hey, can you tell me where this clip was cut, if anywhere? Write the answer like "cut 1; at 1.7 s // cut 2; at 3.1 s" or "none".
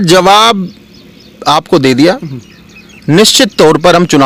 none